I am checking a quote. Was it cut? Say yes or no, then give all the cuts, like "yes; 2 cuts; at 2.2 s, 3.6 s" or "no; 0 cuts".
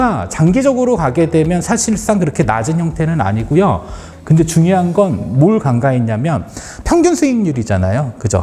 yes; 1 cut; at 4.0 s